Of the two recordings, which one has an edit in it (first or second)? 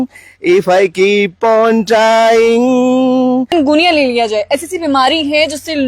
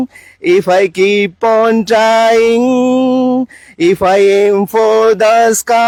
first